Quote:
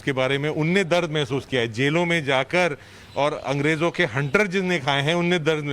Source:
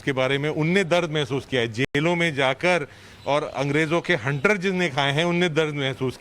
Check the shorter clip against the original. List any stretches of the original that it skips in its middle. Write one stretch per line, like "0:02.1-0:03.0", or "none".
0:01.8-0:01.9